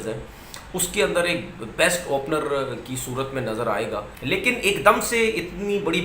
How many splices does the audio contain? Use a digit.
1